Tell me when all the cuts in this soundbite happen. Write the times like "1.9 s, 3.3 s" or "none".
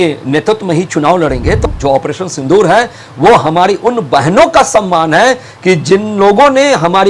1.6 s